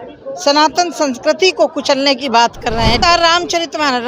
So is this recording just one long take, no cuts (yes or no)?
no